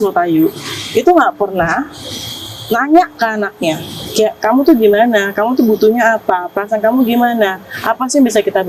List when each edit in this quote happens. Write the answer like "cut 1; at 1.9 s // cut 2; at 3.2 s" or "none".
none